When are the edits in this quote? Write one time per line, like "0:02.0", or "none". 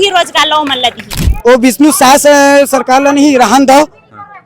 0:01.2